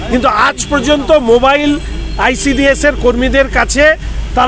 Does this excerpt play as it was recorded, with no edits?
yes; 0 cuts

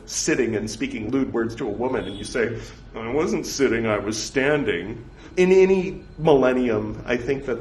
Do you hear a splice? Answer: yes; 2 cuts; at 1.0 s, 5.3 s

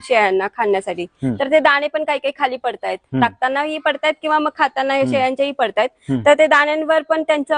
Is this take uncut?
yes; 0 cuts

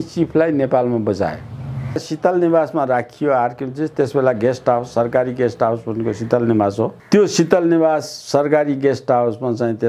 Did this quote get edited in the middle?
yes; 2 cuts; at 2.0 s, 7.0 s

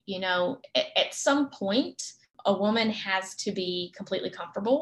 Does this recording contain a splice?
yes; 1 cut; at 2.3 s

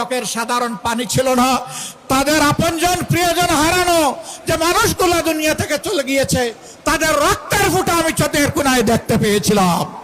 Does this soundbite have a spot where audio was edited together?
no; 0 cuts

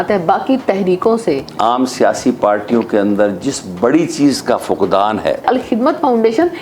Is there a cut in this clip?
yes; 2 cuts; at 1.5 s, 5.4 s

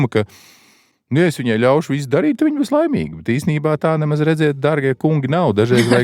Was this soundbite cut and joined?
no; 0 cuts

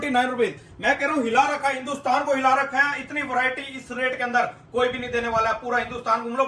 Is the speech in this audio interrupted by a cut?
no; 0 cuts

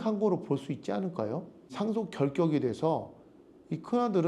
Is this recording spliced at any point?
yes; 1 cut; at 1.7 s

